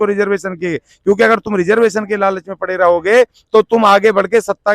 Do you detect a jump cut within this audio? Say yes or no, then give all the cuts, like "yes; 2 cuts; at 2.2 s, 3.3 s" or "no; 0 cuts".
no; 0 cuts